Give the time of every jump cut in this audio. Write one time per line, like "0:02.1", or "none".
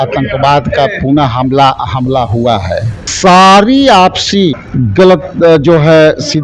0:03.0
0:04.6

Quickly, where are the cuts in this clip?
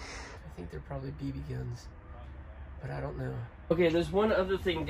0:03.7

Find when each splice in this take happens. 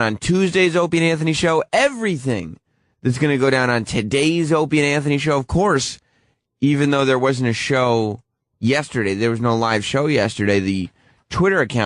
0:01.0

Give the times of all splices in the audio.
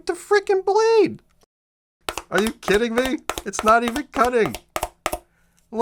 0:01.5

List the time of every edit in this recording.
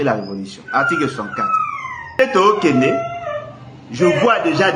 0:02.2

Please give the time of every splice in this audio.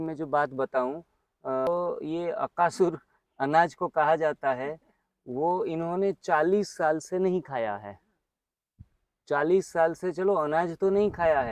0:01.7

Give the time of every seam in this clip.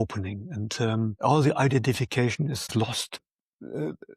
0:01.2
0:02.9

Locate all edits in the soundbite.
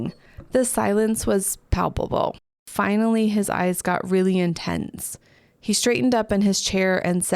0:02.7

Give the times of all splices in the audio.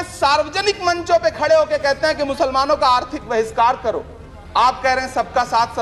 none

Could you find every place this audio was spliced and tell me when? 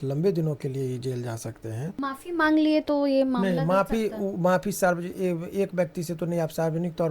0:02.0

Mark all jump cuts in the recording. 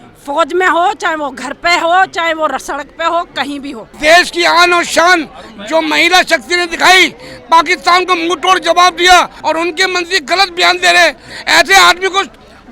0:03.9
0:09.3

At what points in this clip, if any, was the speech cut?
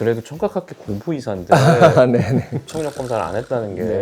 0:02.5

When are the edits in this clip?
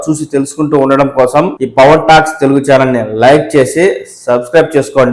0:01.6

